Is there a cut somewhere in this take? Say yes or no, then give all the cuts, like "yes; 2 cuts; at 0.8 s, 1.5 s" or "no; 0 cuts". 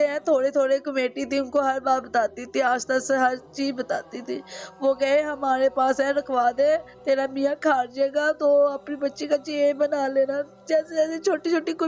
no; 0 cuts